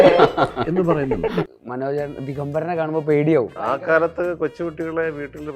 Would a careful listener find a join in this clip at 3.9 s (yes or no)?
yes